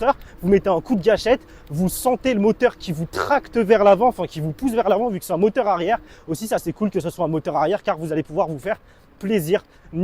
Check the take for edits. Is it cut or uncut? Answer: cut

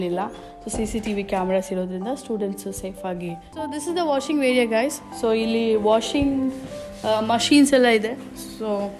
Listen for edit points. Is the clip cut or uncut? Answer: cut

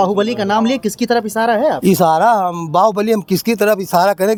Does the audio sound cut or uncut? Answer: uncut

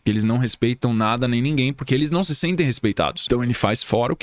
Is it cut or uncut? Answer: cut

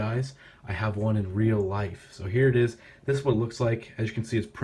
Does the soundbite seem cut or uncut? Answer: uncut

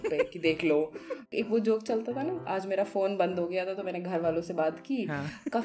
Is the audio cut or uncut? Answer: cut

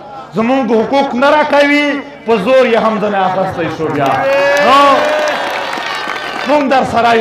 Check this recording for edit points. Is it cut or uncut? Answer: cut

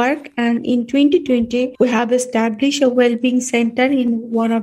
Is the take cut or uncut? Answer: cut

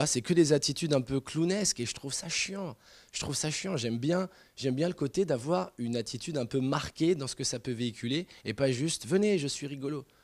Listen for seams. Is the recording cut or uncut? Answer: cut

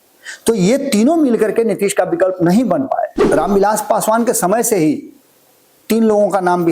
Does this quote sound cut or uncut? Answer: cut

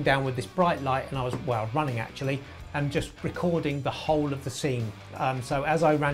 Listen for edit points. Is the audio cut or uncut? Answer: uncut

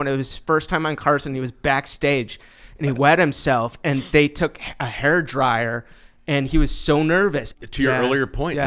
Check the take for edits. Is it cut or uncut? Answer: cut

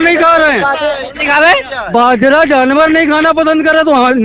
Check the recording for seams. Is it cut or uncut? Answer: uncut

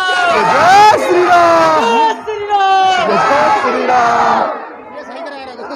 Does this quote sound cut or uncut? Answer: uncut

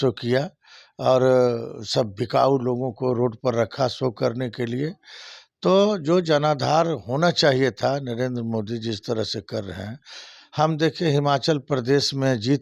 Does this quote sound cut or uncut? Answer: uncut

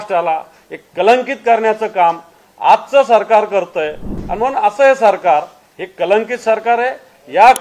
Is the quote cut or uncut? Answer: cut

